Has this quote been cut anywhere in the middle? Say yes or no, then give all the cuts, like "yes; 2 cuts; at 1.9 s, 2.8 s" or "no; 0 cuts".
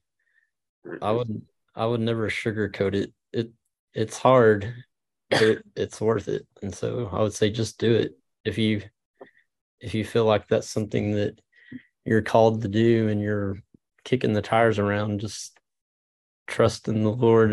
no; 0 cuts